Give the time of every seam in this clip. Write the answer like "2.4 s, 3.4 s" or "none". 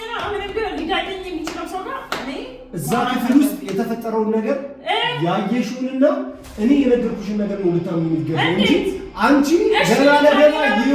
none